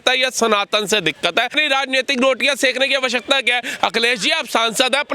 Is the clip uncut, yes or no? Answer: no